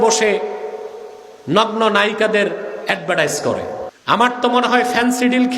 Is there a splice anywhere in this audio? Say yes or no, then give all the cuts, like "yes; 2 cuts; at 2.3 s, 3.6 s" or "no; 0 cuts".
yes; 1 cut; at 3.9 s